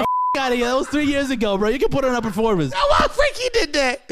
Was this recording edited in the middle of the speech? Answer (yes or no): yes